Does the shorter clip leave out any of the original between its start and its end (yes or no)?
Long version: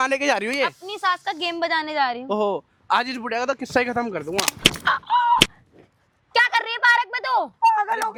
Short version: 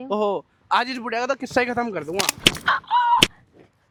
no